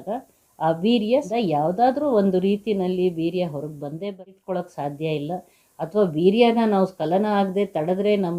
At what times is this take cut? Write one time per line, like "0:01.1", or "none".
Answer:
0:01.3
0:04.0